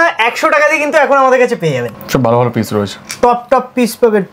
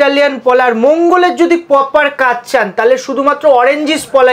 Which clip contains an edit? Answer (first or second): first